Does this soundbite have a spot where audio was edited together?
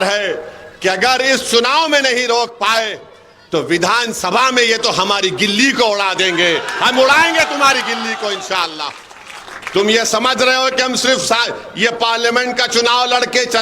no; 0 cuts

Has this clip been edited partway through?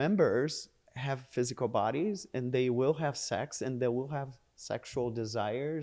no; 0 cuts

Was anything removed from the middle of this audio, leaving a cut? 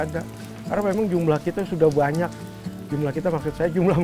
no; 0 cuts

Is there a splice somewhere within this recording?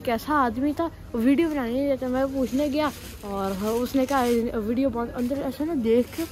no; 0 cuts

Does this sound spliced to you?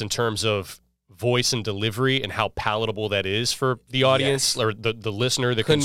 no; 0 cuts

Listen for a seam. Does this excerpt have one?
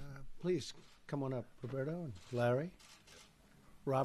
no; 0 cuts

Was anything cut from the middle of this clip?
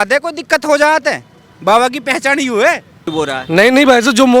yes; 1 cut; at 3.1 s

